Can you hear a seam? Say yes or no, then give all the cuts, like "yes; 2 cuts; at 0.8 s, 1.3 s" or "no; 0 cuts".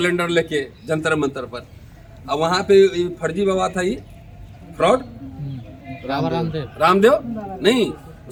no; 0 cuts